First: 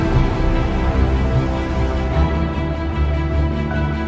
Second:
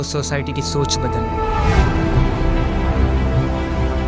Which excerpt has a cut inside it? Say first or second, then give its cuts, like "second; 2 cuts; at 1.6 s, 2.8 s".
second; 1 cut; at 1.1 s